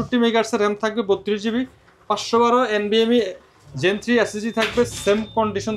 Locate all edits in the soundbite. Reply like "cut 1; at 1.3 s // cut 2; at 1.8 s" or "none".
none

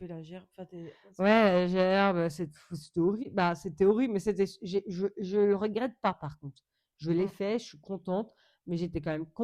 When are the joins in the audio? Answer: none

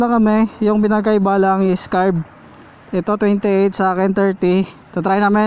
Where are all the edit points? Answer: none

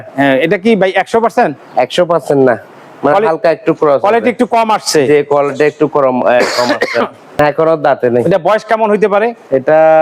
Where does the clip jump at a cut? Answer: cut 1; at 7.4 s

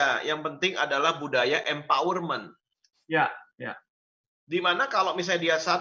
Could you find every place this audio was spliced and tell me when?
none

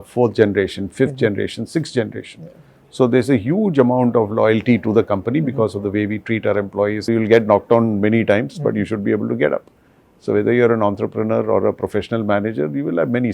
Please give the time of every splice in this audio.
cut 1; at 7.1 s

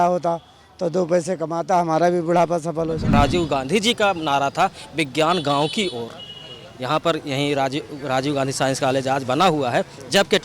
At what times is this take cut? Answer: cut 1; at 3.1 s

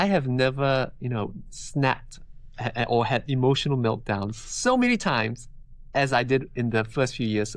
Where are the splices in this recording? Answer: none

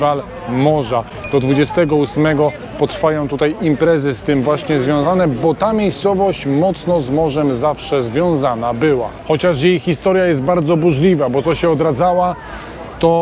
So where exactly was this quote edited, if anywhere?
none

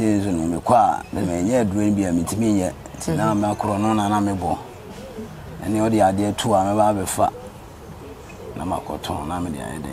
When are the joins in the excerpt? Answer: none

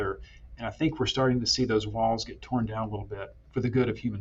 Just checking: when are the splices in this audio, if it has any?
none

